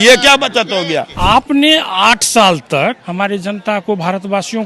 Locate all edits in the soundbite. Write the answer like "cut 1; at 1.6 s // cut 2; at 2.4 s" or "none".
cut 1; at 1.0 s // cut 2; at 3.0 s